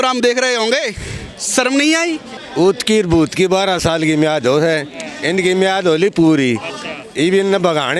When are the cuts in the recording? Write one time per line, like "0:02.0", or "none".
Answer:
0:02.3